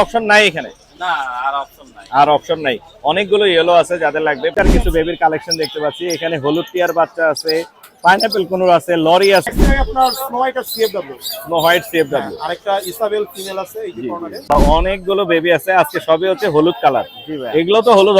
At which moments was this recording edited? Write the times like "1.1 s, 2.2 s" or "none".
4.5 s, 9.5 s, 14.5 s